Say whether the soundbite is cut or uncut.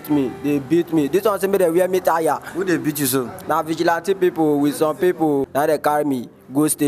cut